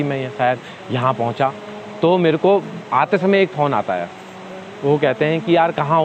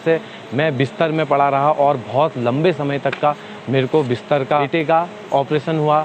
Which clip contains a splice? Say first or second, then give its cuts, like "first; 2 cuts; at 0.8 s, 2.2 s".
second; 1 cut; at 4.7 s